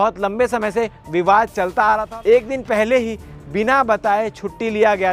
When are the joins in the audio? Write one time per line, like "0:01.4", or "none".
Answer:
0:02.1